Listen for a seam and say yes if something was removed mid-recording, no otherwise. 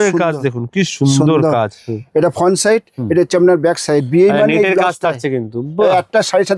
no